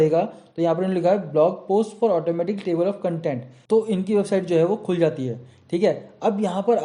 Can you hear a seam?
yes; 1 cut; at 3.5 s

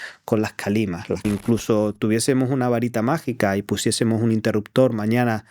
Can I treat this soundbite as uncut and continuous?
no; 1 cut; at 1.2 s

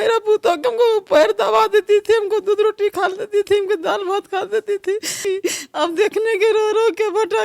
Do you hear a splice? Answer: yes; 1 cut; at 5.2 s

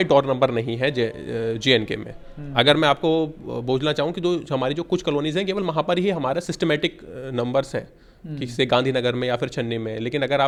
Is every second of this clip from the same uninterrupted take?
yes; 0 cuts

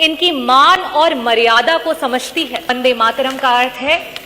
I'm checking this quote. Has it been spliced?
yes; 1 cut; at 2.7 s

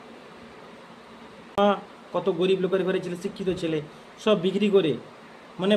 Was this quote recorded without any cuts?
no; 1 cut; at 1.6 s

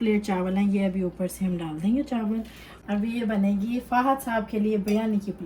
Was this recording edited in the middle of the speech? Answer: yes; 1 cut; at 2.8 s

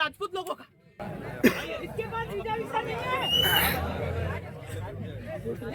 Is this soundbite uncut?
no; 1 cut; at 1.0 s

